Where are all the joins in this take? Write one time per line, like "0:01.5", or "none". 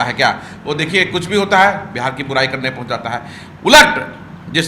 none